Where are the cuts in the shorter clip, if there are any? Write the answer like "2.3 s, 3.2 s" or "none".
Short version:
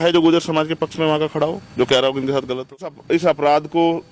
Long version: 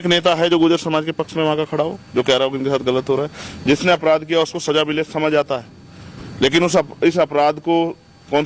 2.9 s